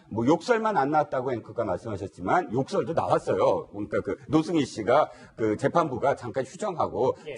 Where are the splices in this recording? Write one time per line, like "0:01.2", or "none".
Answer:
0:02.5